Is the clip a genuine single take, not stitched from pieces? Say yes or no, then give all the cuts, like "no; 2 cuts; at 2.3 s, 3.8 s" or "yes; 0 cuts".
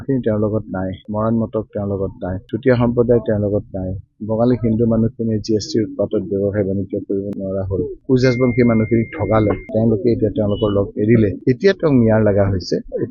yes; 0 cuts